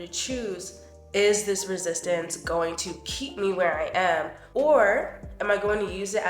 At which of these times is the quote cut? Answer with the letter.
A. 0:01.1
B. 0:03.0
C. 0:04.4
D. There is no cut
C